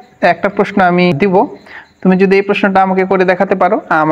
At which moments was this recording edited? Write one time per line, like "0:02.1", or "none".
0:01.1

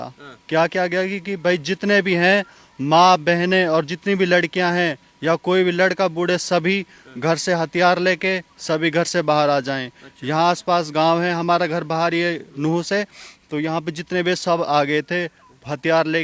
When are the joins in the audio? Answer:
none

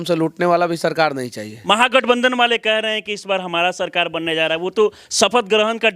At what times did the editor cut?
0:01.5

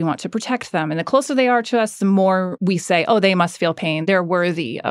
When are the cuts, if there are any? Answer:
0:02.5
0:04.0

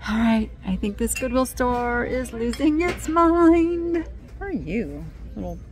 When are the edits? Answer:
0:04.2

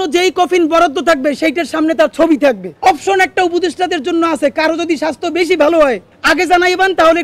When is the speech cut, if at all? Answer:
0:02.7
0:06.1

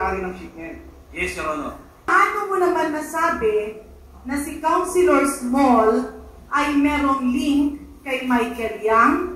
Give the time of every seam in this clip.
0:02.1

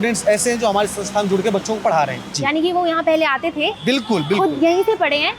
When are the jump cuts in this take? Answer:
0:02.3

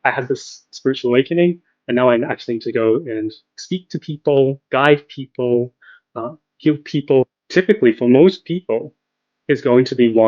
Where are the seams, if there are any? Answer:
0:07.4

